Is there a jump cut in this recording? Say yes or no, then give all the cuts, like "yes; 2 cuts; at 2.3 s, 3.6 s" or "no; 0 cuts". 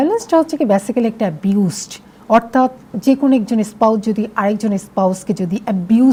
no; 0 cuts